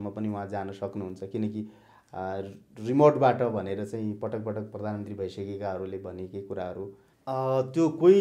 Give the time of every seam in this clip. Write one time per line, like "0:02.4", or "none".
0:07.0